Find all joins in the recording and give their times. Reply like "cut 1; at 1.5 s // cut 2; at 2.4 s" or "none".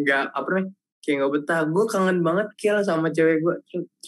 none